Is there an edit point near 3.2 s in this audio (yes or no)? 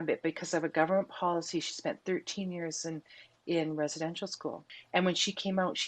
no